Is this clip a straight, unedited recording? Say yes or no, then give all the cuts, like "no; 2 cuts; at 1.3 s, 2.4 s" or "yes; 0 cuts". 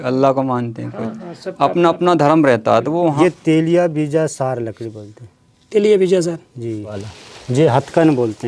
no; 2 cuts; at 3.2 s, 7.0 s